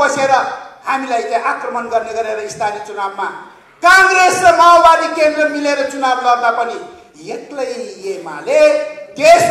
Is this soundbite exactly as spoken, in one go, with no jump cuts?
yes; 0 cuts

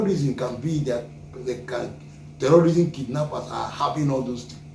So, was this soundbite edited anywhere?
no; 0 cuts

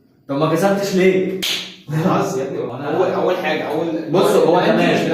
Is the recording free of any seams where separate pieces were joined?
no; 1 cut; at 2.7 s

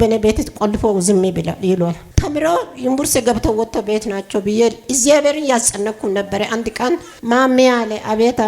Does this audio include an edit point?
yes; 2 cuts; at 2.0 s, 7.1 s

